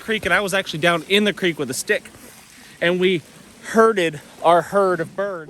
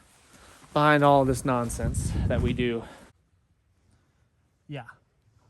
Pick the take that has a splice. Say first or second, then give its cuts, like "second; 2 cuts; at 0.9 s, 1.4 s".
second; 1 cut; at 3.1 s